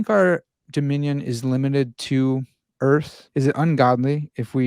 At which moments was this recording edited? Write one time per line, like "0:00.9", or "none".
0:03.2